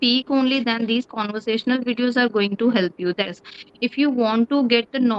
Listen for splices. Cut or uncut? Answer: cut